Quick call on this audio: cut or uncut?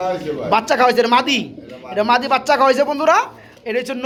uncut